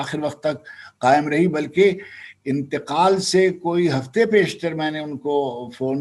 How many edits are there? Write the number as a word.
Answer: zero